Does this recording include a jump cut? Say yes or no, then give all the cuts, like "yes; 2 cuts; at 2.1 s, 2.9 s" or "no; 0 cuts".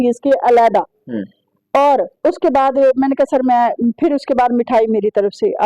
yes; 1 cut; at 2.1 s